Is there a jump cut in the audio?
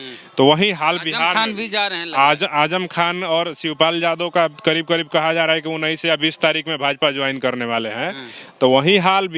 no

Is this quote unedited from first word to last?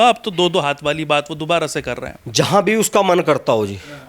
no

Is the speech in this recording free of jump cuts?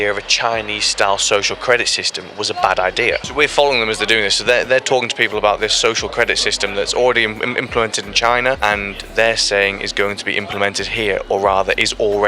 no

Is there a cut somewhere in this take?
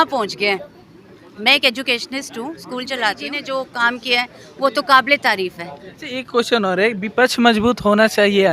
yes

